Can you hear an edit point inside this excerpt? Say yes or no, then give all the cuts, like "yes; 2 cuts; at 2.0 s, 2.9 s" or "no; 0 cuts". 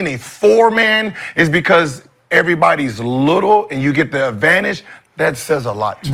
no; 0 cuts